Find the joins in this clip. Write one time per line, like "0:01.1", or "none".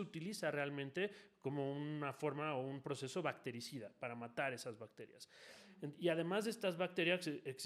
none